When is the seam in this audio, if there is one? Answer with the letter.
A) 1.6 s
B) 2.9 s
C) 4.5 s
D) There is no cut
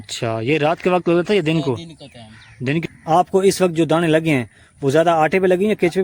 B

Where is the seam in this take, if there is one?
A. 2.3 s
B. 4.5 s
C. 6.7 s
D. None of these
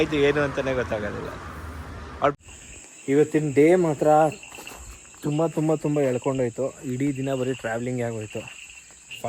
A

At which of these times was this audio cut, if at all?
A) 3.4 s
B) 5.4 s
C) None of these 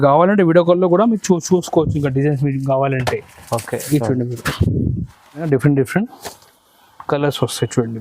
B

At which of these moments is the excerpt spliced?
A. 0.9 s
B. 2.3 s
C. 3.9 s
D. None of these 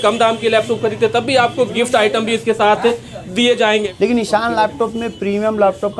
C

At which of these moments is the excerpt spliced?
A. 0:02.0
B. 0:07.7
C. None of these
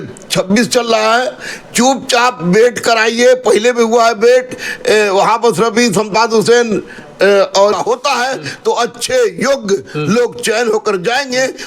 B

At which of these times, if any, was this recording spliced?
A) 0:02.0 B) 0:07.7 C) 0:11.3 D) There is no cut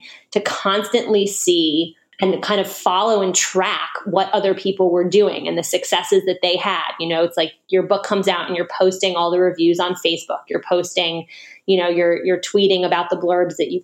A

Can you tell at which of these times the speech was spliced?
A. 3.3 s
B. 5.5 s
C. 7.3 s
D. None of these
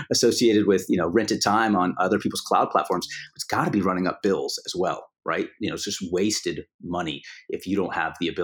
A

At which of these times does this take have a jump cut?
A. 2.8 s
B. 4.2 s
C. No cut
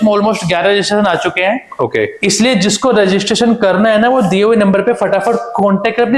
C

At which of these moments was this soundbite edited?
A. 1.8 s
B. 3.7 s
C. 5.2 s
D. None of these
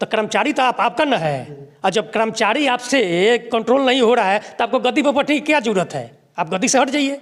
D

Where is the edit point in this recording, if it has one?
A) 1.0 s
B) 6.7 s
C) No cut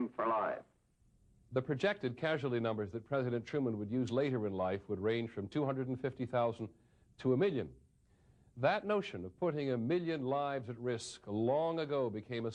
B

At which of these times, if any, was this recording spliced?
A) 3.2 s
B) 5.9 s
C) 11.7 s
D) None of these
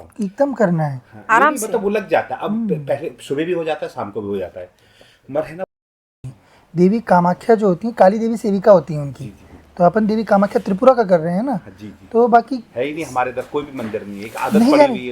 B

